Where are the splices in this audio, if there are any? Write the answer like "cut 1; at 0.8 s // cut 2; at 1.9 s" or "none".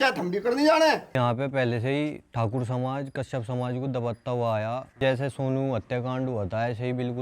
cut 1; at 1.2 s // cut 2; at 5.0 s